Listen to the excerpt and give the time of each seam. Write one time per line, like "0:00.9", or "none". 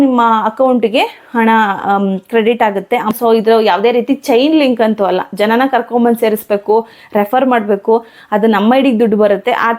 0:03.1